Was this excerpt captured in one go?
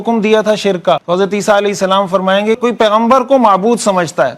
no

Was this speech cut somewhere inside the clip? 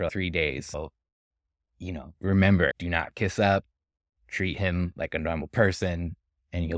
no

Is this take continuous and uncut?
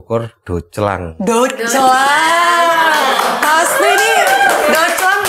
yes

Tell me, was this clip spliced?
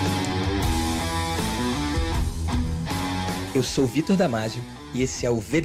no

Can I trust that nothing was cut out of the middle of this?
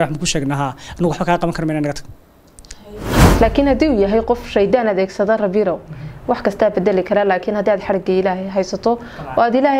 no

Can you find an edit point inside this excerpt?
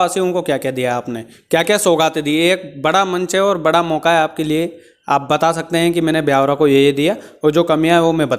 no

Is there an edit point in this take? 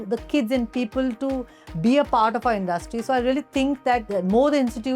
yes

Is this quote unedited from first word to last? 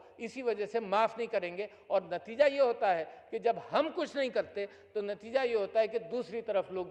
yes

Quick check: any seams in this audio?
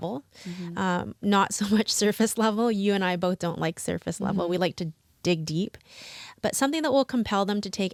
no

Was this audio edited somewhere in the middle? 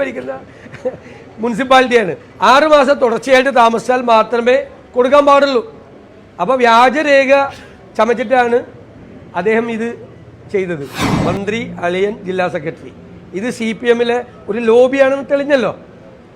yes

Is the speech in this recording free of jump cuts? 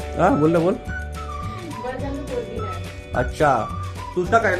yes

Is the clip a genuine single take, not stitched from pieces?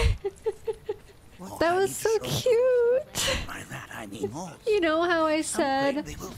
yes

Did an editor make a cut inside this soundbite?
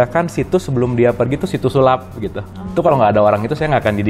yes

